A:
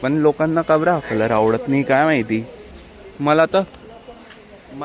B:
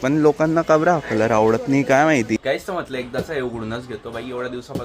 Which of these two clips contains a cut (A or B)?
B